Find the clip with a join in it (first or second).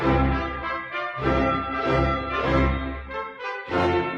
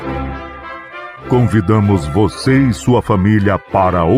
second